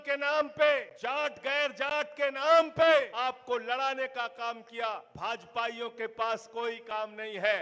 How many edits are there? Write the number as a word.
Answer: three